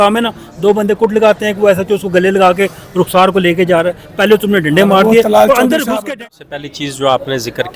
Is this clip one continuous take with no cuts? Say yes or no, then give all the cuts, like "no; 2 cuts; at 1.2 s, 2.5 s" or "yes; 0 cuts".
no; 1 cut; at 6.1 s